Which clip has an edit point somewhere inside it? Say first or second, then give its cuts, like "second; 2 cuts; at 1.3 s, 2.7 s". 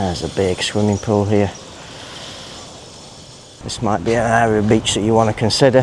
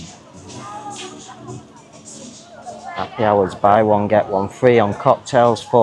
first; 1 cut; at 3.6 s